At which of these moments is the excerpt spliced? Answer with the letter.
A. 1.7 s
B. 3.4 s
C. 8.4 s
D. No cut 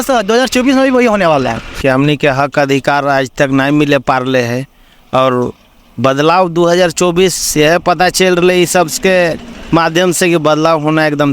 A